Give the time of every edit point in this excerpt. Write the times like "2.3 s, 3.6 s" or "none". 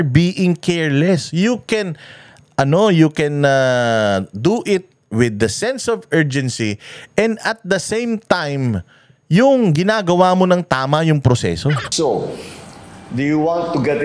11.9 s